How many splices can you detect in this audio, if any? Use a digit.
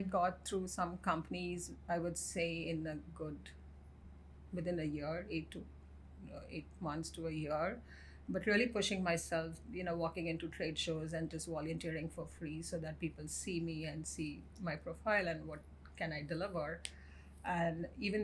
0